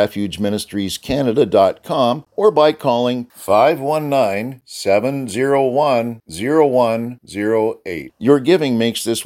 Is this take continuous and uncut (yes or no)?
no